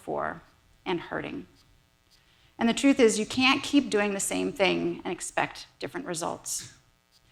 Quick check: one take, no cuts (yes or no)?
yes